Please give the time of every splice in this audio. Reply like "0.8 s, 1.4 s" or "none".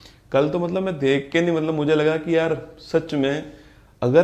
none